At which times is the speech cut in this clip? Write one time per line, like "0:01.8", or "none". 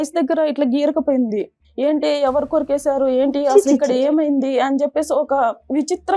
0:01.6